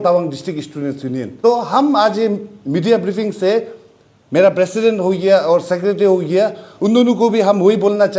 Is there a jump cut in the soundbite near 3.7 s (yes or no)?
no